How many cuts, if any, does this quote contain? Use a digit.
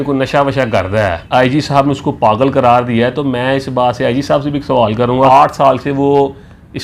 2